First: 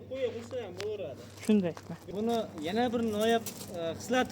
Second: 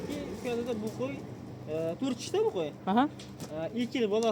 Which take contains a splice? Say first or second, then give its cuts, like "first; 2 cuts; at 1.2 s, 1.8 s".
first; 1 cut; at 2.1 s